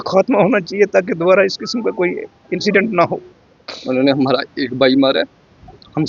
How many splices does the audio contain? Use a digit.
1